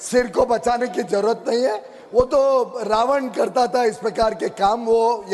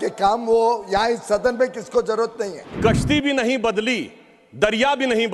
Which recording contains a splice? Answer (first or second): second